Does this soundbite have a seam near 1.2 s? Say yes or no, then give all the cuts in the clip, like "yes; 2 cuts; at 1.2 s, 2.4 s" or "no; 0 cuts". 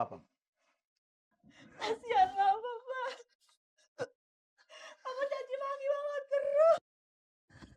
yes; 1 cut; at 1.2 s